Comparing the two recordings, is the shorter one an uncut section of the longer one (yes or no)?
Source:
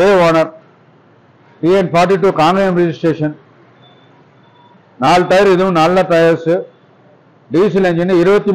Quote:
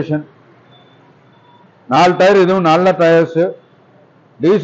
yes